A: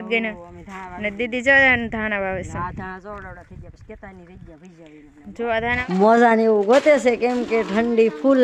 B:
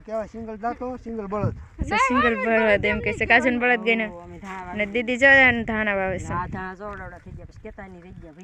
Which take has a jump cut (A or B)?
A